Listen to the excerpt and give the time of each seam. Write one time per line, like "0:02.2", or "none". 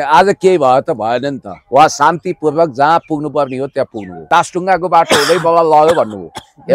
0:04.3